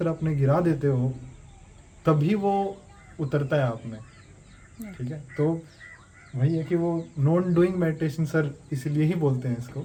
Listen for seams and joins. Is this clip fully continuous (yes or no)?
yes